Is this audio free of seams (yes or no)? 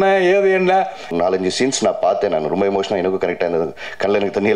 no